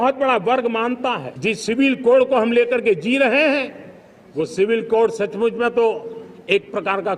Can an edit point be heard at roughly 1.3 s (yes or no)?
yes